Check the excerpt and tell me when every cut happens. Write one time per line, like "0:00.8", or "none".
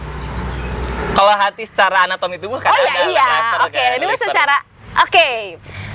none